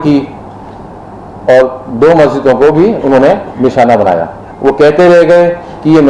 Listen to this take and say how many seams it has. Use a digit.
1